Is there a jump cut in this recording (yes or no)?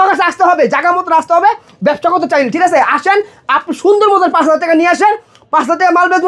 no